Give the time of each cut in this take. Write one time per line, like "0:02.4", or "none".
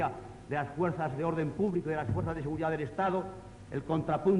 none